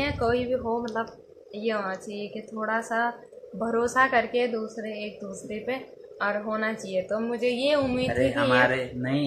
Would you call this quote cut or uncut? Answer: uncut